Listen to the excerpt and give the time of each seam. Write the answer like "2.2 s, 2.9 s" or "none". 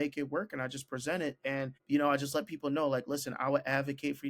1.8 s